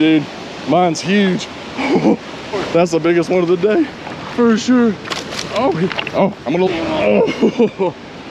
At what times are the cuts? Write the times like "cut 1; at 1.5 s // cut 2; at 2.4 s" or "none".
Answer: cut 1; at 2.4 s // cut 2; at 6.7 s